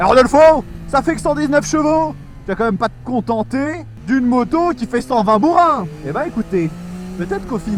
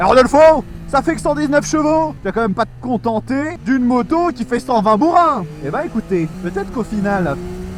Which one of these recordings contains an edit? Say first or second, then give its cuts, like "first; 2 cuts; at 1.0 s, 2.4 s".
second; 3 cuts; at 2.2 s, 3.5 s, 6.4 s